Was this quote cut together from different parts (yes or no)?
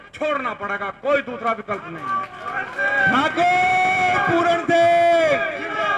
no